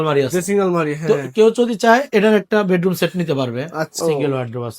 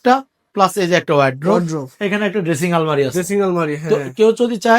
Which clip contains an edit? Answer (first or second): first